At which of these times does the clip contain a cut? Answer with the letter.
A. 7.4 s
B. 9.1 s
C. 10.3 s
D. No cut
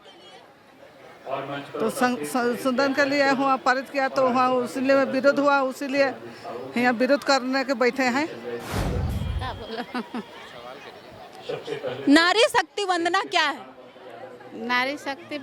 B